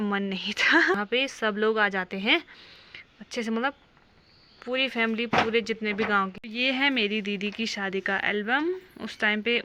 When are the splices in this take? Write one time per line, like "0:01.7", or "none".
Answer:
0:01.0
0:06.3